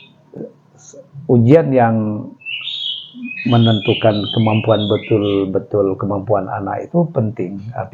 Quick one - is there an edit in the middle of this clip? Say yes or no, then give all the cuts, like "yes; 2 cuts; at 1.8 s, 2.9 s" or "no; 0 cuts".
no; 0 cuts